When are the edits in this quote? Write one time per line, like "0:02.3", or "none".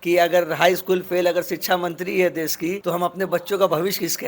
0:02.8